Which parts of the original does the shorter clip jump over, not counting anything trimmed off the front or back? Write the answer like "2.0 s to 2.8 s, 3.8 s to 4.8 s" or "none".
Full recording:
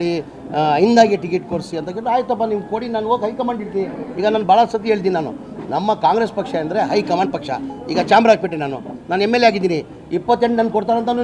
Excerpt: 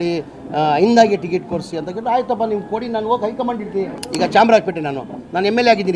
4.0 s to 7.8 s

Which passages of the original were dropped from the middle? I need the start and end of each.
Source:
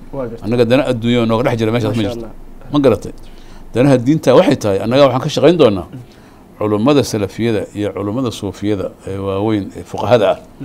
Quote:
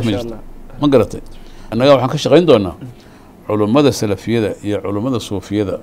3.6 s to 4.8 s

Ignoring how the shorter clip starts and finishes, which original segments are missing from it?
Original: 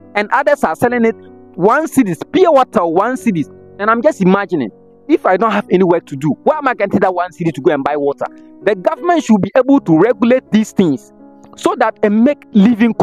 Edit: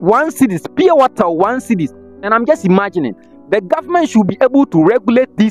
4.9 s to 8.4 s

